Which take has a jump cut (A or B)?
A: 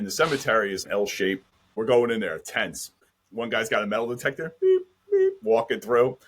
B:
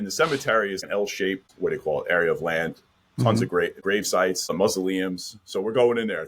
A